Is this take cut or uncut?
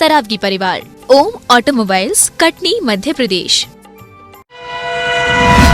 cut